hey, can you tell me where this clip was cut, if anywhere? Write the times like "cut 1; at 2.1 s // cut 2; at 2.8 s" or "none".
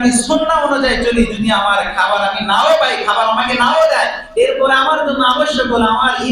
none